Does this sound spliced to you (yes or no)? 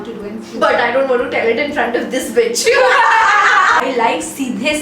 yes